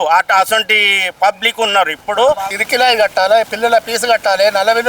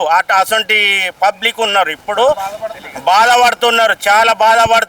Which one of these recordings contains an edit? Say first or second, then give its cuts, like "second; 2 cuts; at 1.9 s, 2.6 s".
first; 1 cut; at 2.6 s